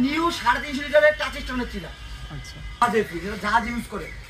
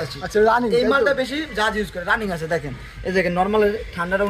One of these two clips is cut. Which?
first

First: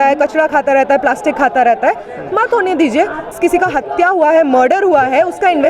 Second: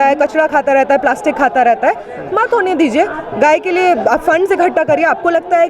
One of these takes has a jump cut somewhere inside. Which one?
first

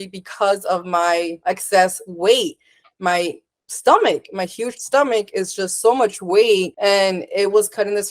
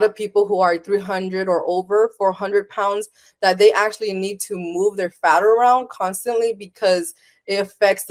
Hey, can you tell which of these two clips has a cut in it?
first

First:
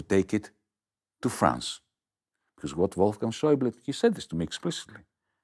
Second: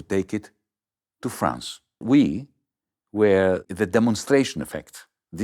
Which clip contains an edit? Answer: second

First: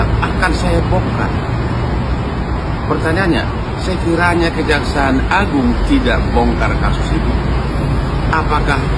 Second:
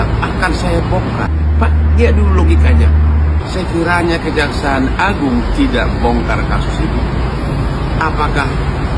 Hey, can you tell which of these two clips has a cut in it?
second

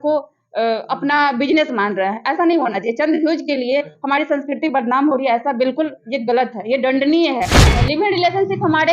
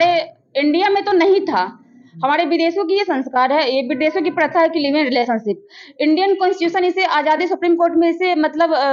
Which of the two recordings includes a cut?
first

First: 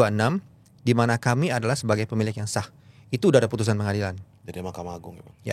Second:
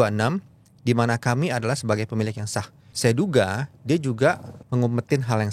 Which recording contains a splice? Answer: second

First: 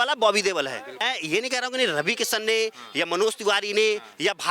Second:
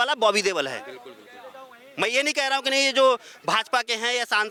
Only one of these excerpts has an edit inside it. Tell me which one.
first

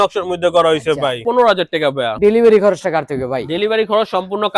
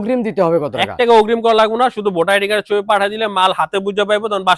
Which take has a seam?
first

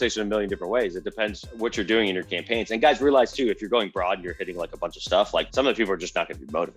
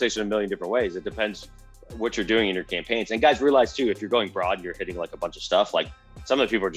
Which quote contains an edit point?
first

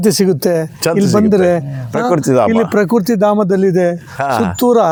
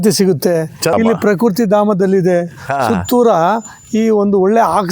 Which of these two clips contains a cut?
second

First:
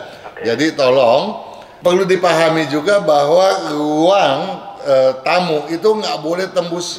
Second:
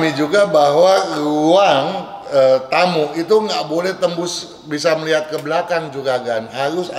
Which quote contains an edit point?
first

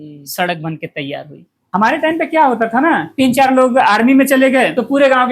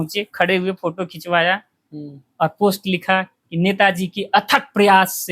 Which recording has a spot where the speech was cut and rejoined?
first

